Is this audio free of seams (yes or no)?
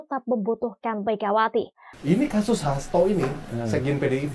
no